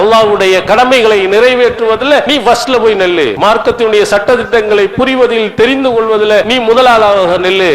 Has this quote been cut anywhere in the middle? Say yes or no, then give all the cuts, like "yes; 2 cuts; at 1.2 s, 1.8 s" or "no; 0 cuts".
yes; 3 cuts; at 2.3 s, 3.3 s, 6.5 s